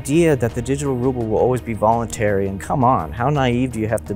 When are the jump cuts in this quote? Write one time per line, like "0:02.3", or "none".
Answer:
0:02.6